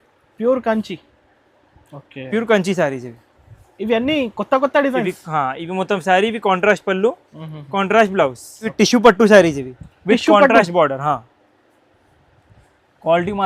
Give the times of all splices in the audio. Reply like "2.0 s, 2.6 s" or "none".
8.7 s